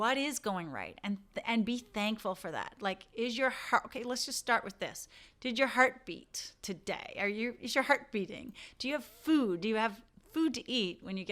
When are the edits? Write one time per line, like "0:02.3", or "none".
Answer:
none